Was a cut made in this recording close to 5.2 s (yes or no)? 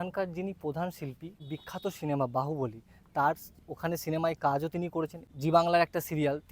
yes